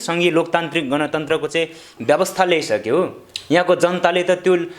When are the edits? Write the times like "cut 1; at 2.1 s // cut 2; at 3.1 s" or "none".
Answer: none